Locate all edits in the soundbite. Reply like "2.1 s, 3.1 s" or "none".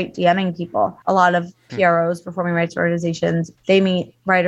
1.0 s, 3.5 s